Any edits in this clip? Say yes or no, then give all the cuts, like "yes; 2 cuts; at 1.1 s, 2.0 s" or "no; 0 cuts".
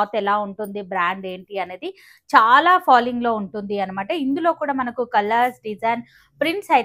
no; 0 cuts